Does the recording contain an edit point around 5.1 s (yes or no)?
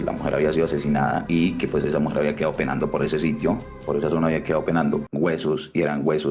yes